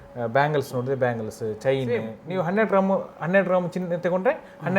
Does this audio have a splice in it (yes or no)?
yes